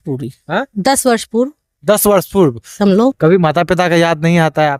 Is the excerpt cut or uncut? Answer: cut